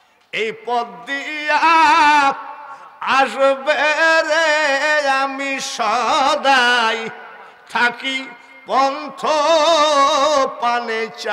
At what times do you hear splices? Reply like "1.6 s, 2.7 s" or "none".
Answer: none